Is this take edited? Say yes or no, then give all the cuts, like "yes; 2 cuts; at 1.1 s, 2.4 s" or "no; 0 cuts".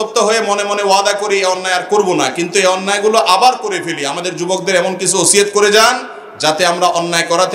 no; 0 cuts